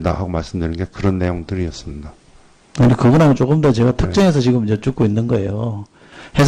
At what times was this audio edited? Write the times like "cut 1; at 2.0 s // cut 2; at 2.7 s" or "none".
cut 1; at 2.6 s